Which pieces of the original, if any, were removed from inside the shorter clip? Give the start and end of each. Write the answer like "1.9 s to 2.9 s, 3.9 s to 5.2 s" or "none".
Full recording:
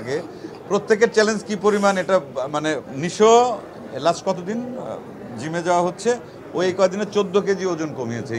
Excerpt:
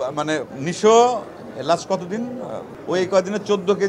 5.1 s to 6.4 s